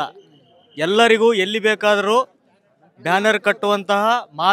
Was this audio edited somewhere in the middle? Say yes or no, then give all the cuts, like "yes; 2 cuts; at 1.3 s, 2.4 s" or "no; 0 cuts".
no; 0 cuts